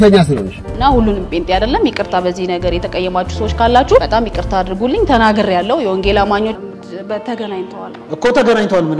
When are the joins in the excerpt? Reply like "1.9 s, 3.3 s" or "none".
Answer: 6.6 s